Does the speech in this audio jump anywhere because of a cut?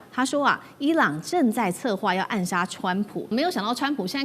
yes; 1 cut; at 3.3 s

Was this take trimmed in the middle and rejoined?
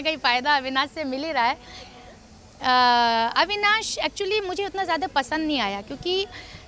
no; 0 cuts

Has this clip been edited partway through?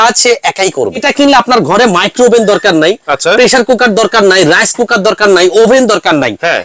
yes; 1 cut; at 1.1 s

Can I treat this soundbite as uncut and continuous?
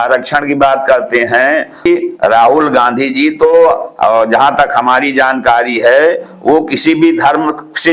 no; 1 cut; at 1.9 s

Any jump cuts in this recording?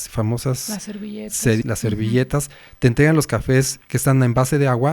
yes; 2 cuts; at 1.7 s, 3.8 s

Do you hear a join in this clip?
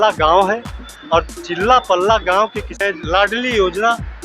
yes; 1 cut; at 2.8 s

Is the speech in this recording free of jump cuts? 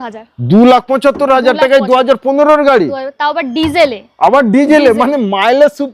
yes; 0 cuts

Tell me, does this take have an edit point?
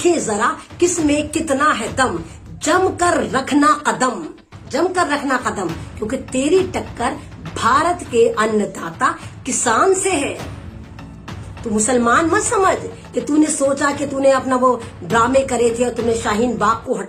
no; 0 cuts

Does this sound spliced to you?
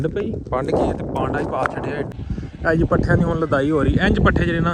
yes; 1 cut; at 2.2 s

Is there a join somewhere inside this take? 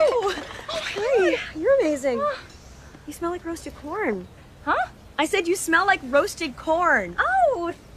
no; 0 cuts

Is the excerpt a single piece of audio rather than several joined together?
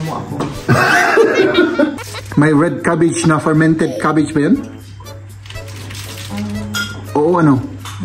no; 1 cut; at 2.1 s

